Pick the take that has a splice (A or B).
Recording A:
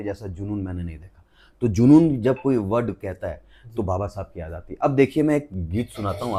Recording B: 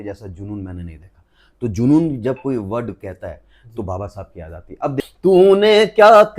B